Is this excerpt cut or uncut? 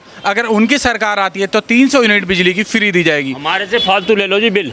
uncut